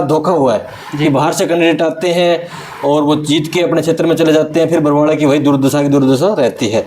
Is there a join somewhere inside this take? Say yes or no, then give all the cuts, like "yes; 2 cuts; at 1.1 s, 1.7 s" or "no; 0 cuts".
no; 0 cuts